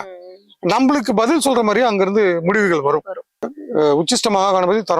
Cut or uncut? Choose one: cut